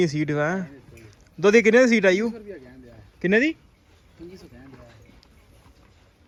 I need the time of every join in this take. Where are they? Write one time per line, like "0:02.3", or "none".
none